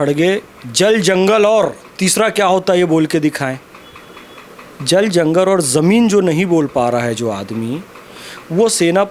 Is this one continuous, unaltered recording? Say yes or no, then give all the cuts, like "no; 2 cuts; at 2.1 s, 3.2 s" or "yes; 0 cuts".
yes; 0 cuts